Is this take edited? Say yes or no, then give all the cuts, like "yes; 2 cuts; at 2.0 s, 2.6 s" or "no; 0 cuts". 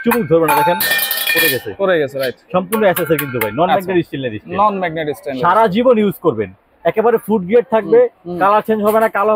no; 0 cuts